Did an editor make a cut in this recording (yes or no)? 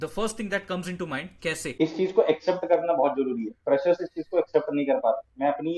yes